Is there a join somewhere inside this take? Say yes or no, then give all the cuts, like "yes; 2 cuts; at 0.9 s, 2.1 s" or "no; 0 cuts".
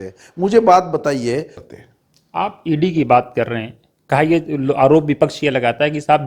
yes; 1 cut; at 1.6 s